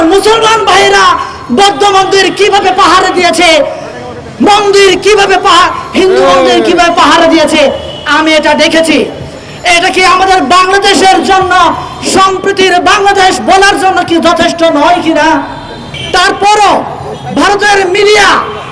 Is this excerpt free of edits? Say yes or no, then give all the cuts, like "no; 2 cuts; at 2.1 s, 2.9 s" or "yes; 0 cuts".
yes; 0 cuts